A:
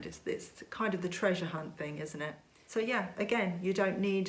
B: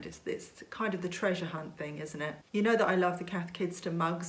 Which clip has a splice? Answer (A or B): A